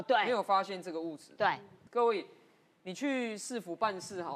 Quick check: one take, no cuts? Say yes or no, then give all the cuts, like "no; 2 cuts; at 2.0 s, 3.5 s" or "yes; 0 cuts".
no; 1 cut; at 1.7 s